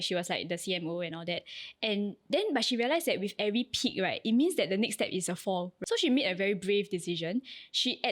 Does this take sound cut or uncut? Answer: cut